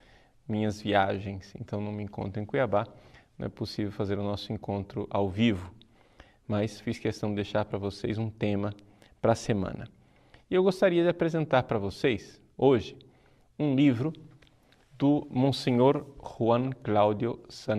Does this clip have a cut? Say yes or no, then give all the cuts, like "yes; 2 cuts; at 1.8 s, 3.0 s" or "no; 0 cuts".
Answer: yes; 1 cut; at 5.2 s